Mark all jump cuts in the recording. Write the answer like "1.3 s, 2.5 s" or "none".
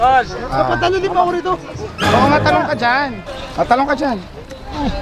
3.2 s